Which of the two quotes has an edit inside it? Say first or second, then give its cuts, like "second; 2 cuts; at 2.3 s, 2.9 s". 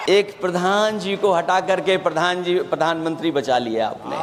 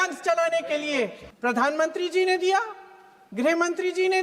second; 1 cut; at 1.2 s